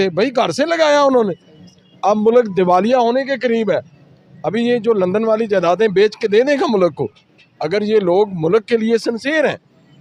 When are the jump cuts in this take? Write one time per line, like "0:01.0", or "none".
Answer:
none